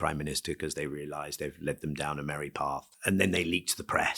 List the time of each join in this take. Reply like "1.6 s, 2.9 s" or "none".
2.9 s

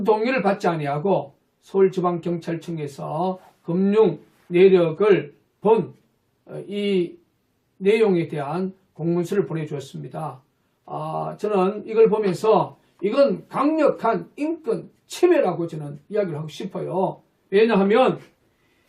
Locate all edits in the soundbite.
5.6 s

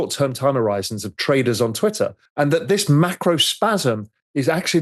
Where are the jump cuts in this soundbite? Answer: 2.2 s

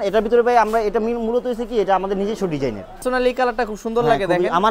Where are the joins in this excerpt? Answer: 3.0 s

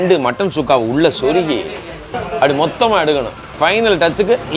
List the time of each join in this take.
3.4 s

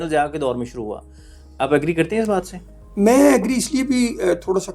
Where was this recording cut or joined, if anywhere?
none

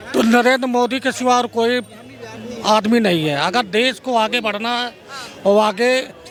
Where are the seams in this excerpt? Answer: none

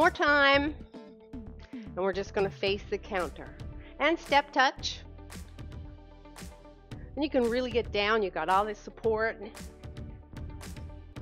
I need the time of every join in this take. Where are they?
4.7 s, 7.1 s, 9.5 s

